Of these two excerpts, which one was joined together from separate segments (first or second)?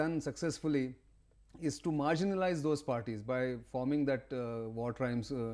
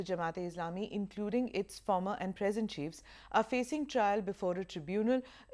first